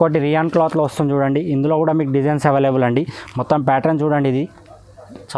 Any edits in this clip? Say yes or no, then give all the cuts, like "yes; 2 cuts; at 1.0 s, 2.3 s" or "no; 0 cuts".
no; 0 cuts